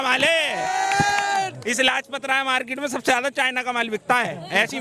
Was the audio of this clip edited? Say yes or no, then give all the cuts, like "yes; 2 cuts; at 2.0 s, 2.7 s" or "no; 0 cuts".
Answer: no; 0 cuts